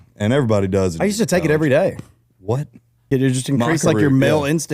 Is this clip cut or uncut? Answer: cut